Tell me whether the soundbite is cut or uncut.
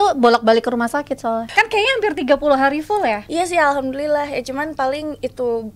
cut